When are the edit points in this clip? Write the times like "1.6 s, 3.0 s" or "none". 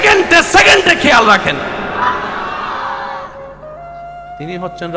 none